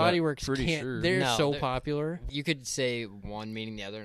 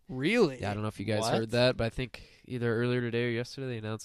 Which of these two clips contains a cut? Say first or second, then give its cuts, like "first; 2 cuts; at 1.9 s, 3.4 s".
first; 1 cut; at 2.2 s